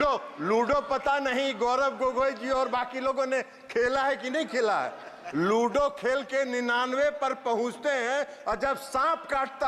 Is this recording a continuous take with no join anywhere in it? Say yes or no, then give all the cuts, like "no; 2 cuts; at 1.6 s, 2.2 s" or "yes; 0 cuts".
yes; 0 cuts